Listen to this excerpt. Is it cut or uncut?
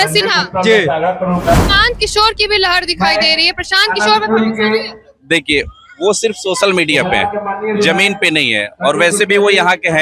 cut